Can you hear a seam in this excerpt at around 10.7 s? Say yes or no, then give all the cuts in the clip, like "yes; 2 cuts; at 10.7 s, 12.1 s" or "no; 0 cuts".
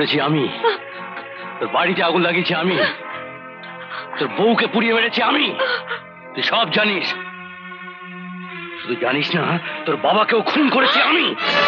no; 0 cuts